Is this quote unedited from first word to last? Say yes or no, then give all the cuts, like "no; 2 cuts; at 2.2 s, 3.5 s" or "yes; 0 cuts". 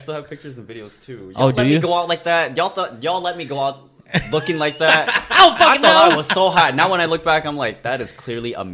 yes; 0 cuts